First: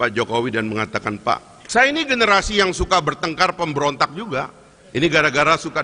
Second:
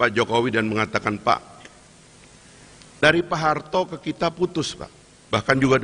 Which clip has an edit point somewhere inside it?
first; 1 cut; at 1.5 s

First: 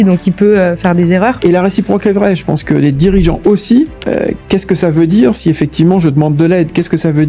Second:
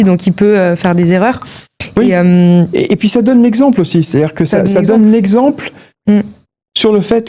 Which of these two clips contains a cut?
first; 1 cut; at 1.4 s

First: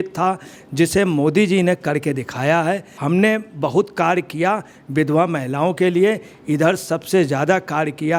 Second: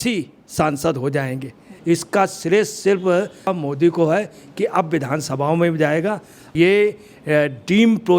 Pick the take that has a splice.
second; 3 cuts; at 1.7 s, 3.5 s, 6.5 s

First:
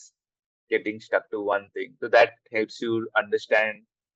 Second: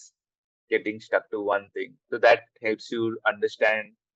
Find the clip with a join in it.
first; 1 cut; at 1.9 s

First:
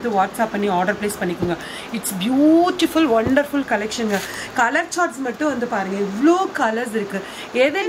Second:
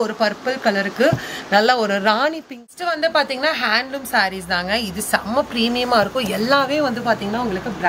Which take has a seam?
second; 1 cut; at 2.7 s

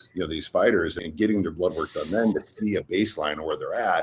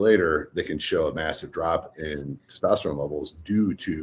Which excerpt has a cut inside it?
first; 1 cut; at 1.0 s

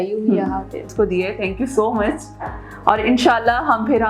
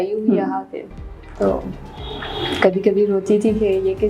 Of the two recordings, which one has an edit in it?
first; 1 cut; at 0.9 s

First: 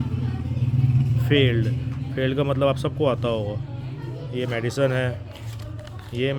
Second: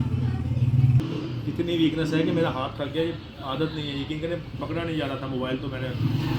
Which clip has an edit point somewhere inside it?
second; 1 cut; at 1.0 s

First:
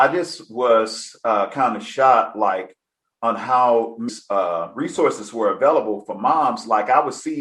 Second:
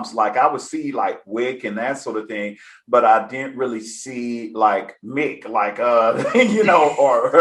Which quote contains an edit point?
first; 1 cut; at 4.1 s

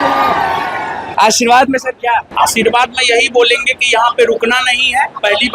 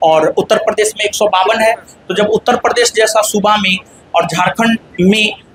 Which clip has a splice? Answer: first; 2 cuts; at 1.0 s, 2.3 s

